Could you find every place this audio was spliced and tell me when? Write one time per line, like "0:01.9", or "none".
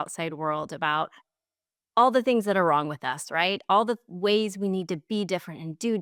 none